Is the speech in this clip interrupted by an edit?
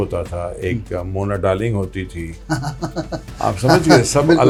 no; 0 cuts

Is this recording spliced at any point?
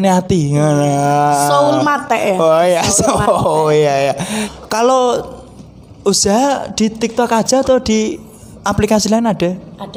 yes; 1 cut; at 4.5 s

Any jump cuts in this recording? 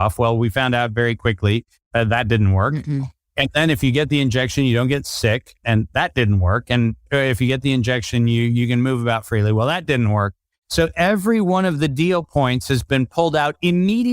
yes; 1 cut; at 7.0 s

